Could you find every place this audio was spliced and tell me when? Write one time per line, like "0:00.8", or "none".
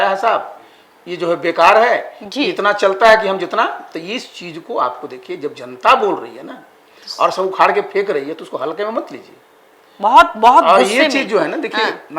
none

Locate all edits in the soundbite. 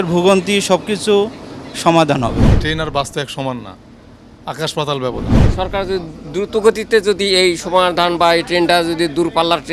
0:02.5
0:05.4

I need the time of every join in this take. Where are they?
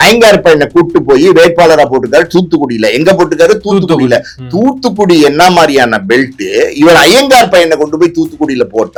none

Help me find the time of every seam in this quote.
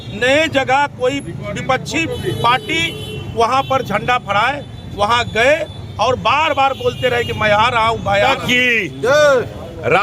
0:08.3

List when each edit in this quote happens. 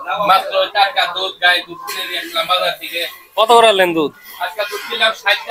none

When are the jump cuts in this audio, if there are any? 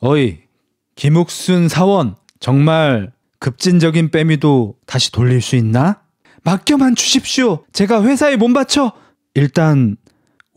0:02.3

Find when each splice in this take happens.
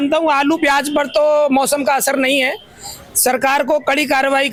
none

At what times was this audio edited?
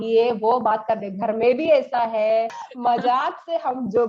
0:02.6

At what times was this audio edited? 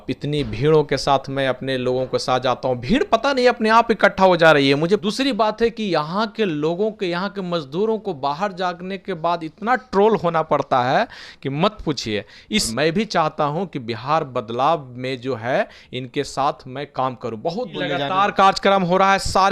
0:05.0
0:12.7
0:17.8

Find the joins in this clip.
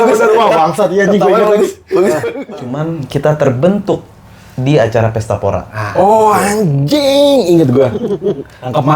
0:02.3

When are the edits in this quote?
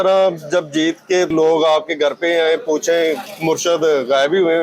0:01.3
0:03.3

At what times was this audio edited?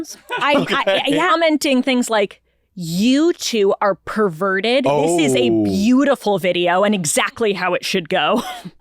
0:01.3

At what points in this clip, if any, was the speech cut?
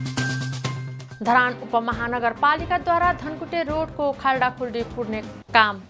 0:00.9

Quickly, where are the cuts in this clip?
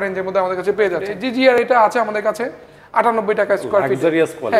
0:01.1

